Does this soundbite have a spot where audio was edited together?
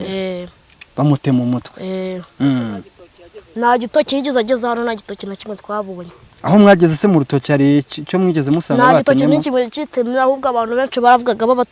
no; 0 cuts

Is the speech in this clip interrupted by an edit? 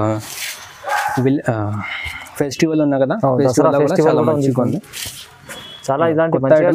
no; 0 cuts

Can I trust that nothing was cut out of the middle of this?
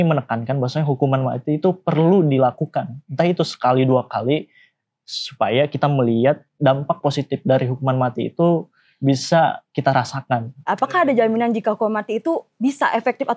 yes; 0 cuts

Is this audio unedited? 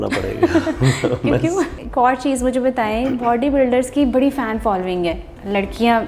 no; 1 cut; at 1.7 s

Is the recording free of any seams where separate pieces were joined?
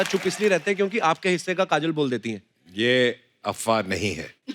yes; 0 cuts

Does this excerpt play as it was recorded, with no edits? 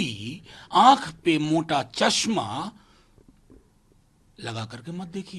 yes; 0 cuts

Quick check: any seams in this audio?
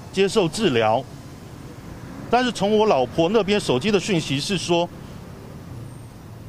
no; 0 cuts

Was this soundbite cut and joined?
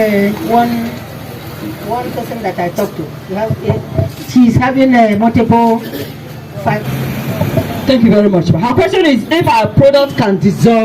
yes; 1 cut; at 6.8 s

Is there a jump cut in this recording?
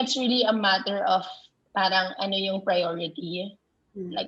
no; 0 cuts

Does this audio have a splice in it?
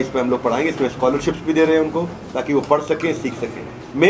no; 0 cuts

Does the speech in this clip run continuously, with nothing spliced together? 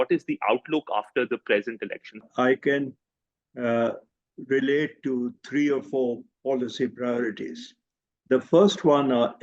no; 1 cut; at 2.2 s

